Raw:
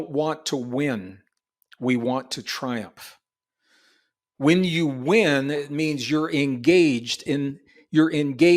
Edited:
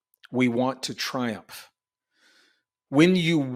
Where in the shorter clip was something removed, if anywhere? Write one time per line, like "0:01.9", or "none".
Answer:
none